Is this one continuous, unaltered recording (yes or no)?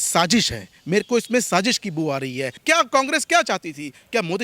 no